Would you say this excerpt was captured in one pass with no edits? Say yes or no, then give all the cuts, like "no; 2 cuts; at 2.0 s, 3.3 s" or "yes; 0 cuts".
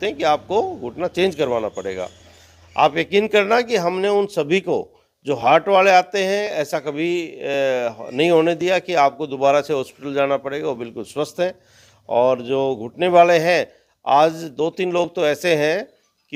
yes; 0 cuts